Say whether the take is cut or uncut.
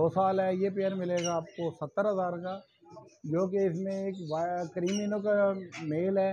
uncut